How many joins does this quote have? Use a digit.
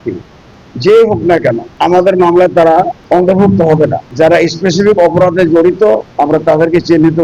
4